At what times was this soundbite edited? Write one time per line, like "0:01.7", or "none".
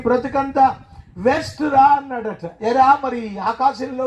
0:02.5